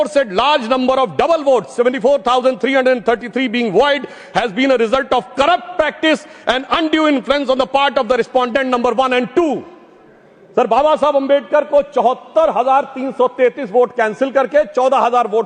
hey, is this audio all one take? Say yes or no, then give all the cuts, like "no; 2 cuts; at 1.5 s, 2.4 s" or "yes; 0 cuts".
yes; 0 cuts